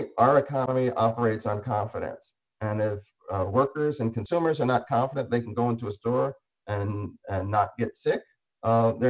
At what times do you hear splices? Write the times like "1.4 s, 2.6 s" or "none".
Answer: none